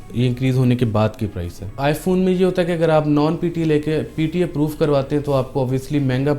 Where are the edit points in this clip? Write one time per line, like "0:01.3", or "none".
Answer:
0:01.8

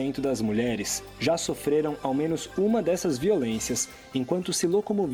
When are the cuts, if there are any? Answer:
none

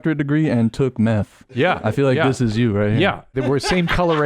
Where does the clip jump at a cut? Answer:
0:03.3

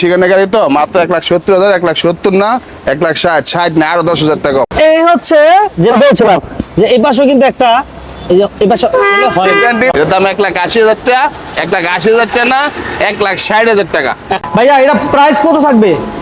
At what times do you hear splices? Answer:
0:04.7
0:09.9
0:14.3

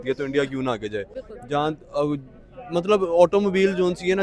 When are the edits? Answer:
none

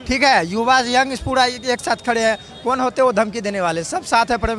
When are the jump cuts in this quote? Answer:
none

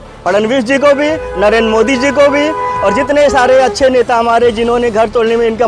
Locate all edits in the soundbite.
none

